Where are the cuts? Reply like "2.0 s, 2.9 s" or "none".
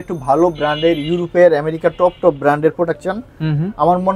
none